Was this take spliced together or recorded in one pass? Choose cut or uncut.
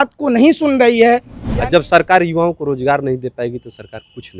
cut